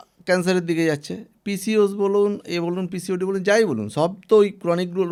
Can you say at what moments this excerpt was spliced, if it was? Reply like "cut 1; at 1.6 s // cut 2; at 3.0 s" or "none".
none